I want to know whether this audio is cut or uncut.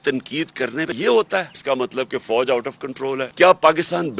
cut